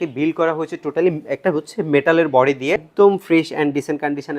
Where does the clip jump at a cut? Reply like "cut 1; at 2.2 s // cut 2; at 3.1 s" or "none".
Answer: cut 1; at 2.9 s